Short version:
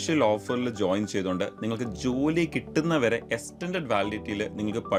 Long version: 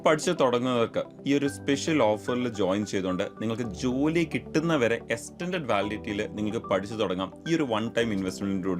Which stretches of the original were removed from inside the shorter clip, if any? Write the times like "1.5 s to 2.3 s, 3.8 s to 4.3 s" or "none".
none